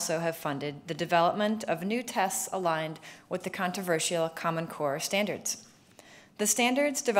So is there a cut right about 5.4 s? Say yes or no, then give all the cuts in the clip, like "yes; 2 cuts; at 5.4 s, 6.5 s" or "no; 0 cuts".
yes; 1 cut; at 5.4 s